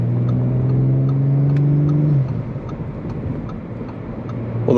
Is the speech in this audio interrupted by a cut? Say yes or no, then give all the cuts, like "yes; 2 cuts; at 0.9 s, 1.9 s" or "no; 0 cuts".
no; 0 cuts